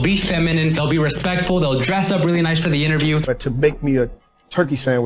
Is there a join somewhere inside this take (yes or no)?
yes